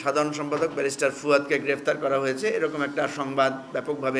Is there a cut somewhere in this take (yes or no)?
no